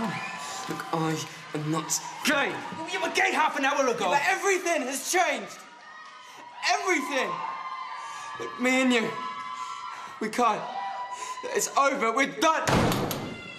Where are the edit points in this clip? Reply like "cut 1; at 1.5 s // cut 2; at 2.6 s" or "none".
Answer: none